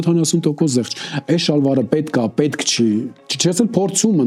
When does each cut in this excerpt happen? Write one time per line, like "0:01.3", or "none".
none